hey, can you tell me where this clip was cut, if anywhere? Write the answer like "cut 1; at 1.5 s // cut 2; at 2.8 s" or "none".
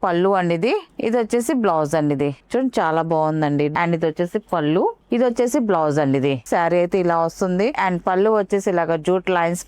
cut 1; at 2.4 s // cut 2; at 3.7 s // cut 3; at 6.4 s // cut 4; at 7.8 s